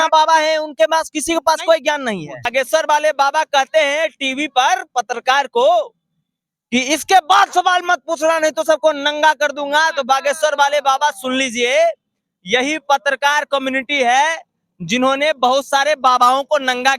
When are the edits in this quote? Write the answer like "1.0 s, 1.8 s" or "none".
2.4 s